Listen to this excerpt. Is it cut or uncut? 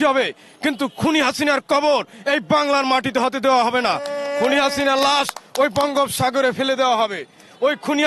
uncut